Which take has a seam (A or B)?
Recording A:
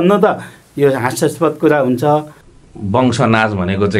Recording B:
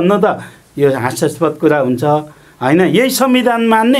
A